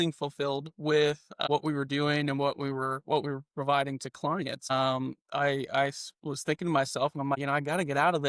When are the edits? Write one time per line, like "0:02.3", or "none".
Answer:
0:01.4
0:04.7
0:07.4